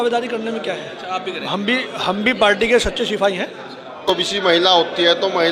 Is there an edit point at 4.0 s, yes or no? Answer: yes